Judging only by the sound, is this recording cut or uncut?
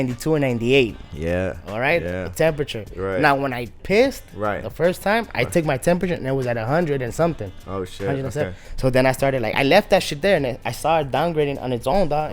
uncut